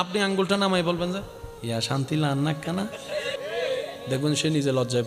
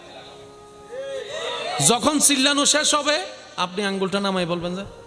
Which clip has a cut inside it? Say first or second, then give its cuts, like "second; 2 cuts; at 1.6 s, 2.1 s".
first; 1 cut; at 3.3 s